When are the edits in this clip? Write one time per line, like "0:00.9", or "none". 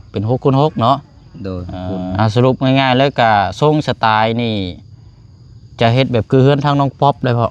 0:02.1